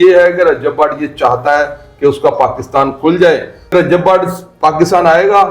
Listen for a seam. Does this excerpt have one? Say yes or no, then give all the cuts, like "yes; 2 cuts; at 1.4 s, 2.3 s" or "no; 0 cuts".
yes; 1 cut; at 3.7 s